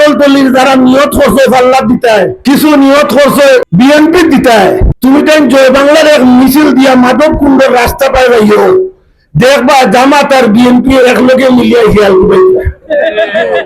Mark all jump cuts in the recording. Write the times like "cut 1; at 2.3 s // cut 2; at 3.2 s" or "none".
cut 1; at 2.4 s // cut 2; at 3.7 s // cut 3; at 4.9 s